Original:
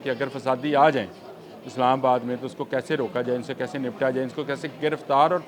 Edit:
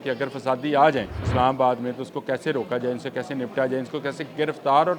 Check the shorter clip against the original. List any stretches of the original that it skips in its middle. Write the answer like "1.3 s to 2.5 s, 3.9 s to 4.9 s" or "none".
1.2 s to 1.6 s